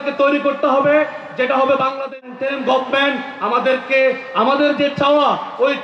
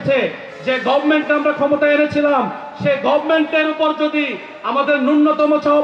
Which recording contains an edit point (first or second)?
first